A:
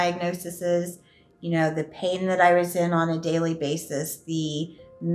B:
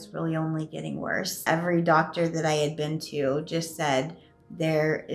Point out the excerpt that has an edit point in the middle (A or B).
B